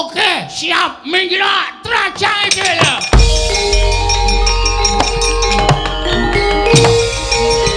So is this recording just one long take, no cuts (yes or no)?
yes